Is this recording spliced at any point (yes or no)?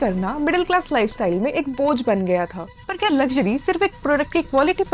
yes